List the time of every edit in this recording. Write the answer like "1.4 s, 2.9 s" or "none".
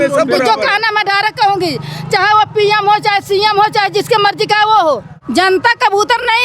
5.1 s

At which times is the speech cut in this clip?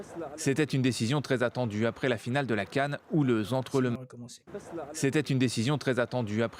3.9 s

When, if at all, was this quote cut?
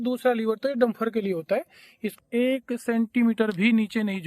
2.1 s

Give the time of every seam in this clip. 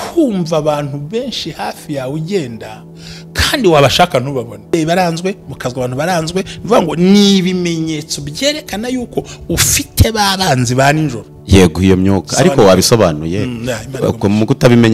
4.7 s

